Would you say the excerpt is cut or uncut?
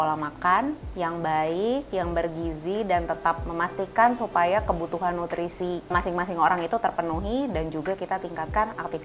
cut